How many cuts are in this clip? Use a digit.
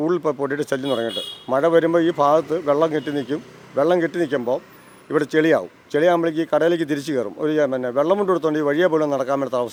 0